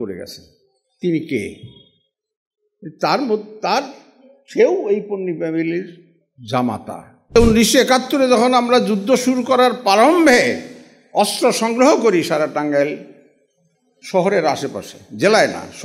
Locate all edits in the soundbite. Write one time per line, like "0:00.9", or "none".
0:07.3